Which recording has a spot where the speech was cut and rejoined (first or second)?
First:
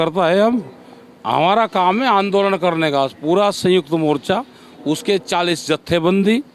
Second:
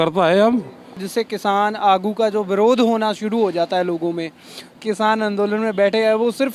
second